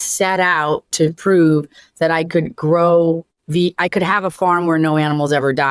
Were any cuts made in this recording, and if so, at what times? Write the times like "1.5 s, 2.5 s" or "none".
3.3 s